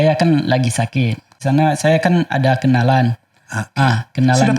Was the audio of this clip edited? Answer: yes; 1 cut; at 1.4 s

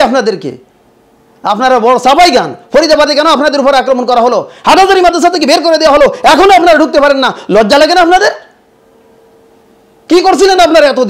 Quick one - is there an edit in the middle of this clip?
no; 0 cuts

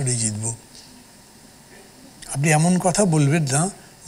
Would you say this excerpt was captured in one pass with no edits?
yes; 0 cuts

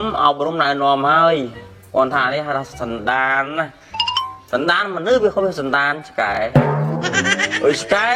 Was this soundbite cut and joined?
no; 0 cuts

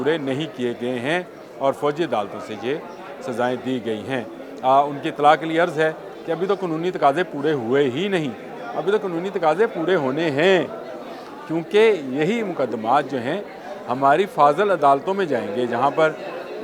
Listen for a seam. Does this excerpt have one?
no; 0 cuts

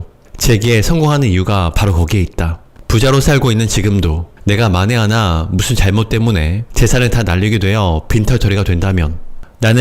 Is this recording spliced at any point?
yes; 2 cuts; at 2.7 s, 4.3 s

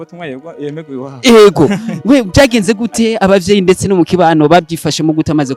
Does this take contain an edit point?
no; 0 cuts

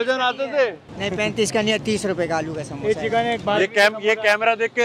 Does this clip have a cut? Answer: no; 0 cuts

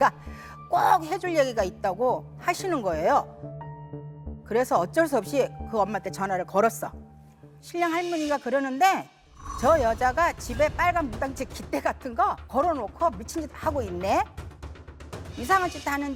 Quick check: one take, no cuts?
yes; 0 cuts

